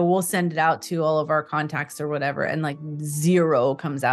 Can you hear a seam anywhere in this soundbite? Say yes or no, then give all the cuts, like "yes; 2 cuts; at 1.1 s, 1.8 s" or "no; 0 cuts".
no; 0 cuts